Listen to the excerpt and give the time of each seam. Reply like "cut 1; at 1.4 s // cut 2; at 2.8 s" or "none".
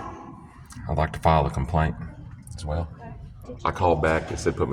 cut 1; at 3.5 s